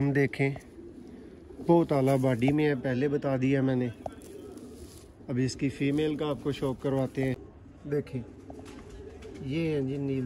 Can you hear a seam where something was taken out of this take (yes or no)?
yes